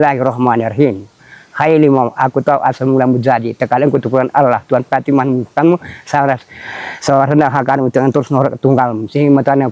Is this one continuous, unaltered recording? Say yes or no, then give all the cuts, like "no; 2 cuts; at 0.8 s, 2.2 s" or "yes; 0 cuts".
yes; 0 cuts